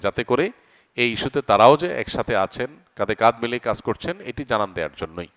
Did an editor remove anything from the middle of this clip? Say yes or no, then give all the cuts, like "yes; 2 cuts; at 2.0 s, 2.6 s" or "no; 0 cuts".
no; 0 cuts